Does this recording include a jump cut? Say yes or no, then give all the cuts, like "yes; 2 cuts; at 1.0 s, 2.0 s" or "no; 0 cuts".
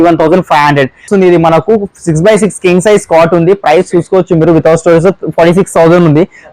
yes; 1 cut; at 1.1 s